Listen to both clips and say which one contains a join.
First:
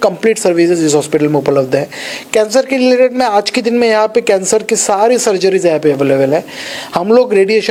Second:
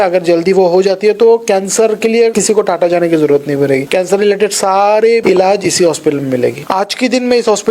second; 4 cuts; at 2.4 s, 3.9 s, 5.2 s, 6.6 s

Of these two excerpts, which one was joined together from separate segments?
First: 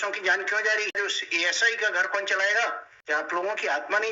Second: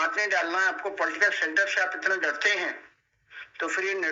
first; 2 cuts; at 0.9 s, 2.9 s

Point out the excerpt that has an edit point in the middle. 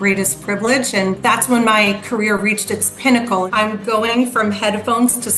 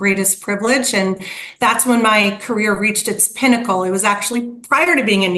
first; 2 cuts; at 1.2 s, 3.5 s

